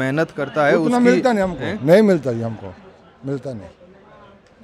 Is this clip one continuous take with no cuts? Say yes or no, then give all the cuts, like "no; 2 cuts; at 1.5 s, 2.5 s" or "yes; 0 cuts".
yes; 0 cuts